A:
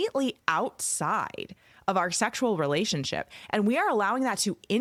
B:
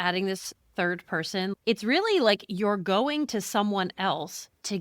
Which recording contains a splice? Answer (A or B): B